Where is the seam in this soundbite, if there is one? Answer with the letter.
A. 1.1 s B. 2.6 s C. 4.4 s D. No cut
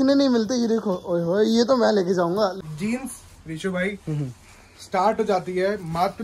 B